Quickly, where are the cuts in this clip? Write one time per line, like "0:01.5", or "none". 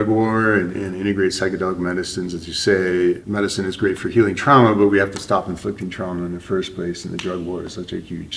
0:03.2